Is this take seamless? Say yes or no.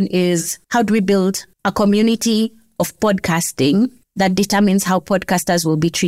yes